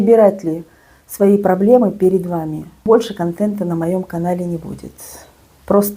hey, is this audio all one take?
no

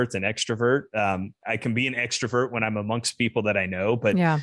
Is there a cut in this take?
yes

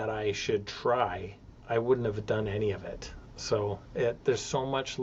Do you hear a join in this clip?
no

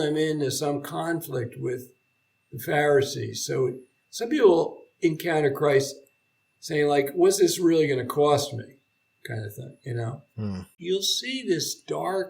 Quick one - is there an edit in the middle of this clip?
yes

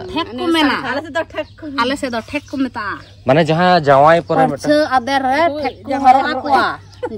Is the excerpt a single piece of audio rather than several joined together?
yes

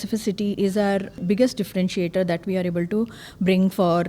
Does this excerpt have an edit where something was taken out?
yes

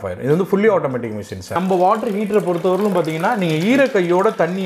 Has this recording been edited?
yes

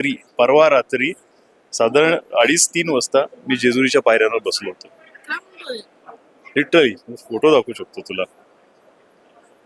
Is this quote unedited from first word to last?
yes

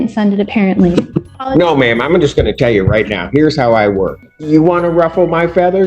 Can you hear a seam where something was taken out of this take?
yes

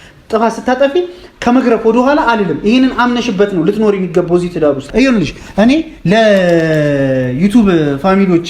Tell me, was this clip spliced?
yes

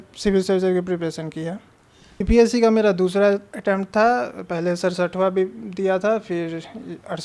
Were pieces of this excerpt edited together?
yes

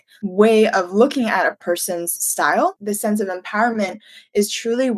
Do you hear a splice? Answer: yes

